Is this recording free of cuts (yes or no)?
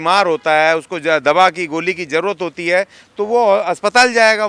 yes